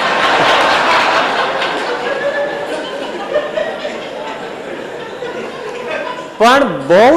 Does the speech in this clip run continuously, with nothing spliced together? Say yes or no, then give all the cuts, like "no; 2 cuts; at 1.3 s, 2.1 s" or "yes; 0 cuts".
yes; 0 cuts